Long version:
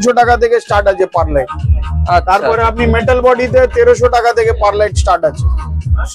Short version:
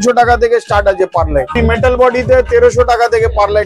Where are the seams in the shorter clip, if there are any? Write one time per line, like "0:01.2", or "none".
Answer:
0:01.5